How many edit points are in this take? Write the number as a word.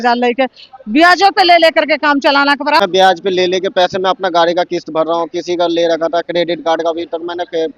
one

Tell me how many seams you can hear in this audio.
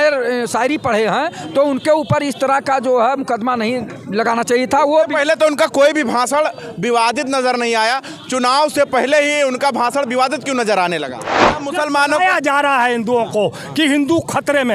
one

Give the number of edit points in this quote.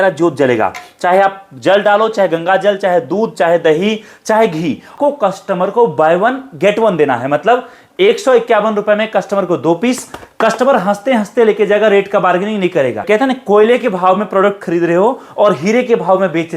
two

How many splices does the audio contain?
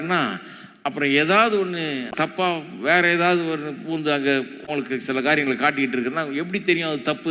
one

